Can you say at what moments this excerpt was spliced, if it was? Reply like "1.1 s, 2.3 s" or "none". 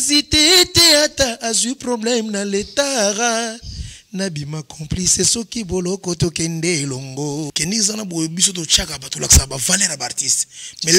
7.5 s